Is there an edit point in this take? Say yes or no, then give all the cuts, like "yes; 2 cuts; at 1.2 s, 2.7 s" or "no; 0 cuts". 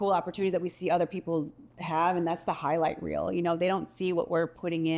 no; 0 cuts